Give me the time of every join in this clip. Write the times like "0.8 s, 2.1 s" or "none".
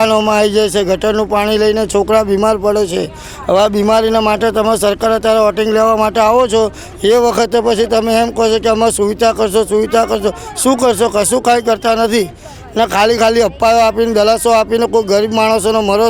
none